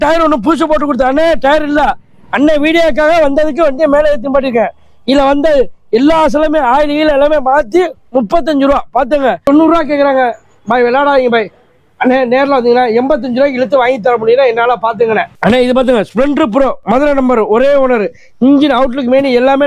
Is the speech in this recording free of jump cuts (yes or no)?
no